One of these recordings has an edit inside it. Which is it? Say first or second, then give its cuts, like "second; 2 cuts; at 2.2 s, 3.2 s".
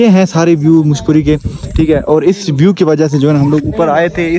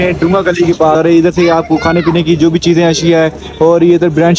second; 1 cut; at 1.0 s